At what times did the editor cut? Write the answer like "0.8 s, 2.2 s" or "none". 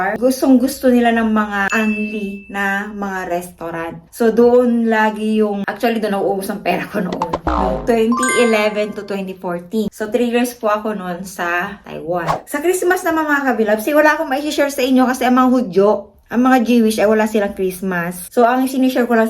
12.4 s